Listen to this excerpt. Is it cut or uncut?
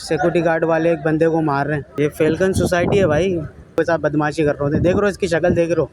cut